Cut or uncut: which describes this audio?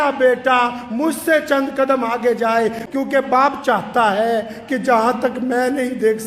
cut